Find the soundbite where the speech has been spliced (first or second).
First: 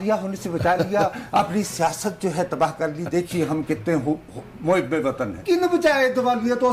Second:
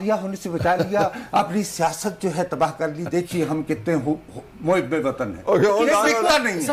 first